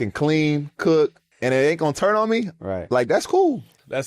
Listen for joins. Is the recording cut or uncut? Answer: cut